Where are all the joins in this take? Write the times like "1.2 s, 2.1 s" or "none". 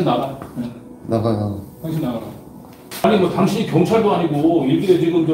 2.8 s